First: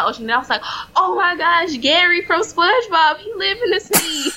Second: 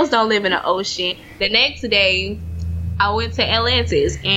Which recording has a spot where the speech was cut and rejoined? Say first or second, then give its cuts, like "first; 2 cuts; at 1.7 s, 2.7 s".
second; 1 cut; at 1.2 s